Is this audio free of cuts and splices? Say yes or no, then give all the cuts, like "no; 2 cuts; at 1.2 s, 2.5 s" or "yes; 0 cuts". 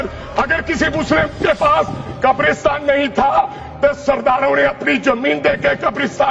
yes; 0 cuts